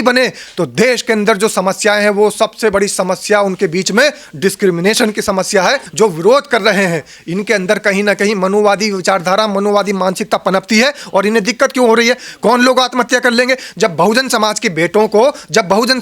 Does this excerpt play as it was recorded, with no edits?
no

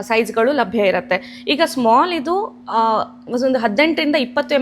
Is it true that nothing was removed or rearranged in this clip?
yes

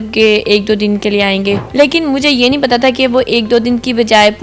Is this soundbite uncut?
no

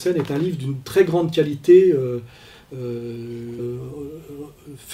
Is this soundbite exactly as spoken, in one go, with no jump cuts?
yes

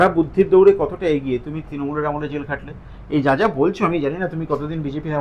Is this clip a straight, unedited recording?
yes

